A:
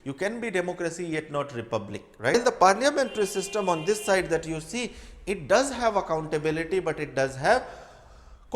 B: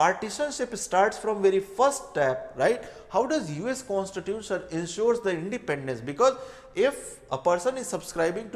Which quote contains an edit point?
A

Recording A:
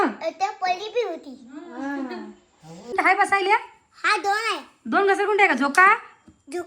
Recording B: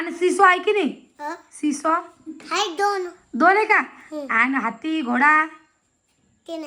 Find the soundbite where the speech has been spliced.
A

